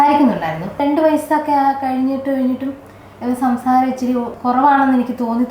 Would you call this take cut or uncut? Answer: cut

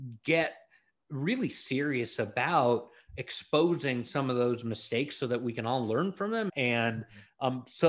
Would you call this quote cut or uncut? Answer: cut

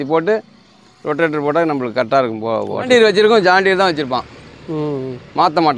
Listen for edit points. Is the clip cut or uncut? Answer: cut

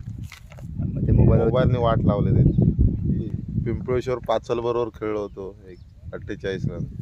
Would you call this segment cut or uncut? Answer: cut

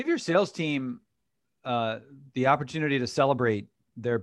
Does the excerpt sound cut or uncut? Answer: uncut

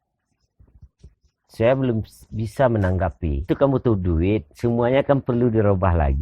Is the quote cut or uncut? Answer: cut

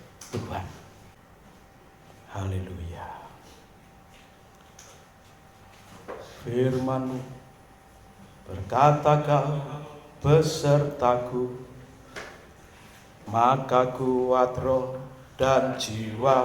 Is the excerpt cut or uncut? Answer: cut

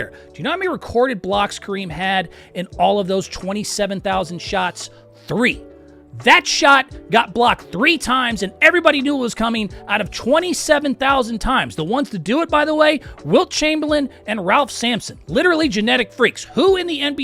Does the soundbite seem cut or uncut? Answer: uncut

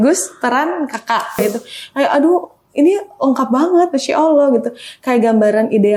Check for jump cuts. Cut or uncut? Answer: cut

